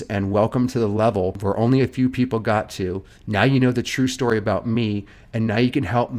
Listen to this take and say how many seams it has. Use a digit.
1